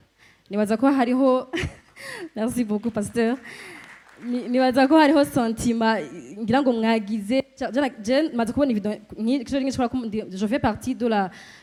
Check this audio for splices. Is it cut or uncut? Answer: uncut